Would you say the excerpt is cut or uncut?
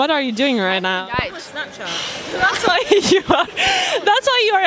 uncut